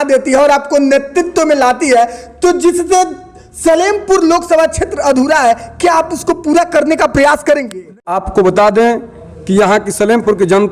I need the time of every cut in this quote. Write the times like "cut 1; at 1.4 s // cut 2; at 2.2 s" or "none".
cut 1; at 8.1 s